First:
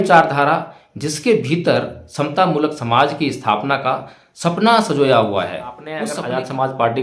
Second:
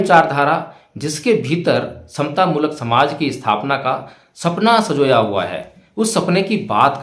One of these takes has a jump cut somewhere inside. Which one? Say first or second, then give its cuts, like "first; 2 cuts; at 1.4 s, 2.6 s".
first; 1 cut; at 5.8 s